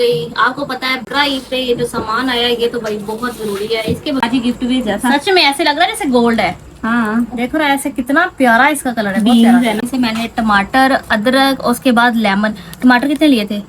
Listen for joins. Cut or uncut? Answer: cut